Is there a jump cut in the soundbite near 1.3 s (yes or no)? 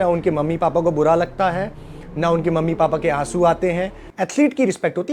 no